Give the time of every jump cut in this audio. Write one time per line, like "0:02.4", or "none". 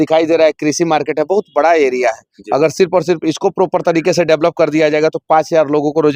none